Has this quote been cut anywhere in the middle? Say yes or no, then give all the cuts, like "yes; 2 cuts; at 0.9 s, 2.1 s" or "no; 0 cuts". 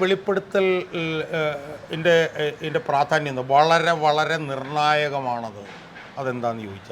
no; 0 cuts